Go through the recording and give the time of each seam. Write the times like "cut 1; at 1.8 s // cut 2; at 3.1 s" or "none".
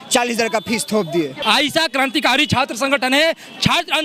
cut 1; at 1.4 s